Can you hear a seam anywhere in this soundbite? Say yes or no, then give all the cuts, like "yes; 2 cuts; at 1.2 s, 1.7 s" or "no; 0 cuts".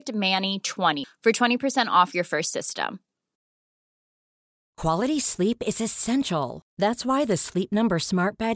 yes; 1 cut; at 1.0 s